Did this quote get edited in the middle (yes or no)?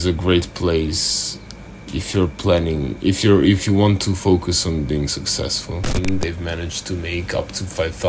yes